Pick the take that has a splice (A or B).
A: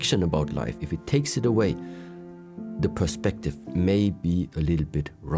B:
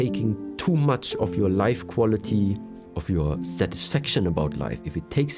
B